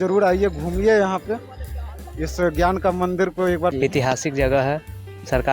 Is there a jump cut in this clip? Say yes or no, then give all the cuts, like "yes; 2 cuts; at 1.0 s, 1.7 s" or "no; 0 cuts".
yes; 1 cut; at 3.7 s